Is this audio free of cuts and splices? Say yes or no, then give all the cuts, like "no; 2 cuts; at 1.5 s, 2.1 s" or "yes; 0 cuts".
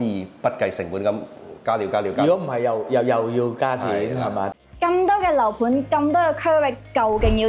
no; 1 cut; at 4.5 s